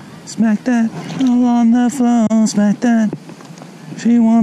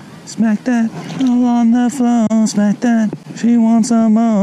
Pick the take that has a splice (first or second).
second